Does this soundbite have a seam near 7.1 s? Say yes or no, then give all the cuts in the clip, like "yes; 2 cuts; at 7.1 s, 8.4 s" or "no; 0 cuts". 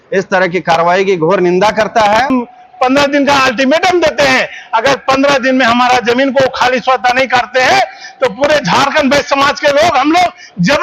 no; 1 cut; at 2.3 s